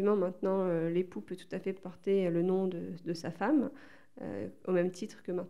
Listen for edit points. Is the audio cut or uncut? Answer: uncut